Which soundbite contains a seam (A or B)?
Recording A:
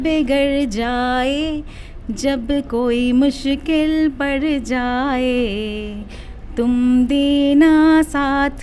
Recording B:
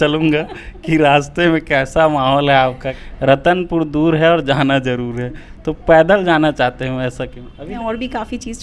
B